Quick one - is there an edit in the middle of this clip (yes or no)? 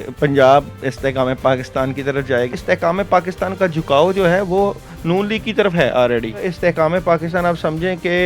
yes